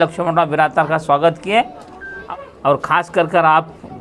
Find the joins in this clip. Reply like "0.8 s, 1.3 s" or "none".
2.1 s